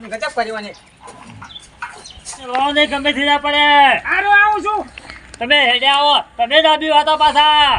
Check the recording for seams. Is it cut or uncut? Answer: cut